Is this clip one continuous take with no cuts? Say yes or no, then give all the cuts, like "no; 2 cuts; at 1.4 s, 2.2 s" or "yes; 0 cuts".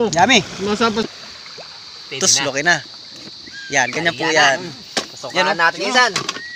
no; 1 cut; at 1.0 s